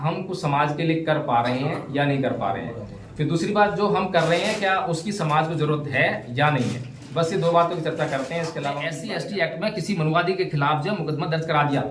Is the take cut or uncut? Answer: cut